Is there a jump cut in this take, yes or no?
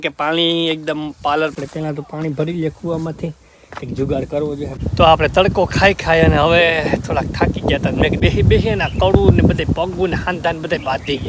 yes